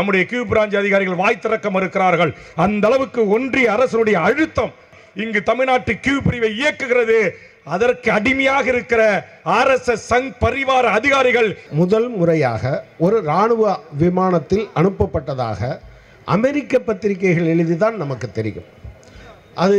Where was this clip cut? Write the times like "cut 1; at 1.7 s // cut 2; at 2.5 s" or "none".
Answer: cut 1; at 5.0 s // cut 2; at 11.6 s